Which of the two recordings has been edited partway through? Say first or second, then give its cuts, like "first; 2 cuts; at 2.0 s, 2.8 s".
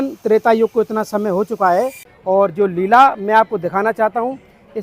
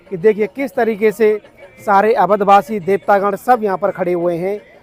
first; 1 cut; at 2.1 s